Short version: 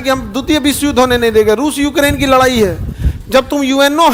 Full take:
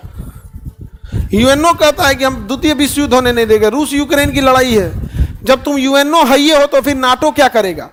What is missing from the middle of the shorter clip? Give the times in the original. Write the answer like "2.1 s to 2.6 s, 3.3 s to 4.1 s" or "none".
none